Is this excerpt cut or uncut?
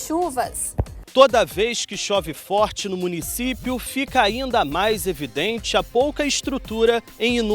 cut